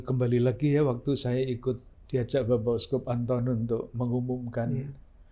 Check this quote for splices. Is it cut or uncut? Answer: cut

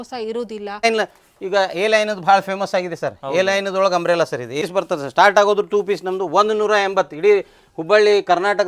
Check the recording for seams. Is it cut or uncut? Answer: cut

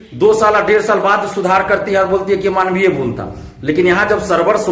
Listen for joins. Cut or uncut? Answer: uncut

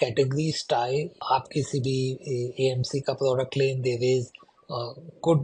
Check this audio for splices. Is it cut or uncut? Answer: cut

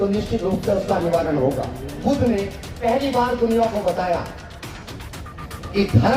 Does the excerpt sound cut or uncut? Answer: cut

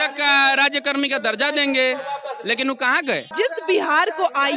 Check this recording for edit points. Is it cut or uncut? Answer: cut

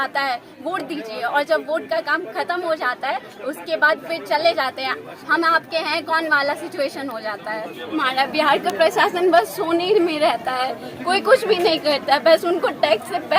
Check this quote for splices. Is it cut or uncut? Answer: cut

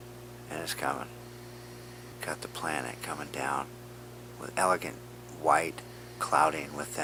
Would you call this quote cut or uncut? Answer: uncut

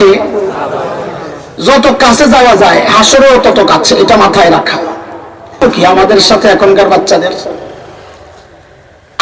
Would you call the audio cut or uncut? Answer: cut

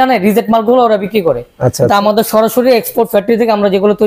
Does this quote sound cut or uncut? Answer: uncut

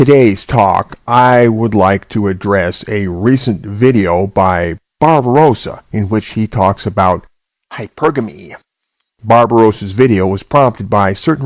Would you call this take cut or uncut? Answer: cut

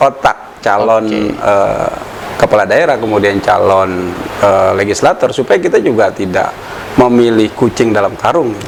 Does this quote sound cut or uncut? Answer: uncut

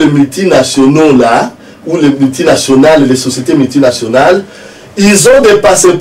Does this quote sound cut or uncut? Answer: uncut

